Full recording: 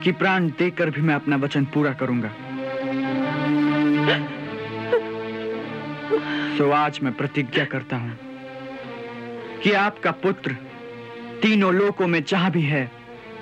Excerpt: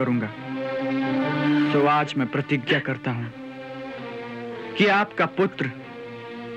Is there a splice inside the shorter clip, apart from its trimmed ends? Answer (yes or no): yes